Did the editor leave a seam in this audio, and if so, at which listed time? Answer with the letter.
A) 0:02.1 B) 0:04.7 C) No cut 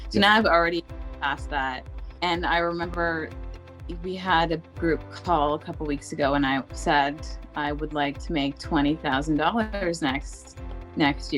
A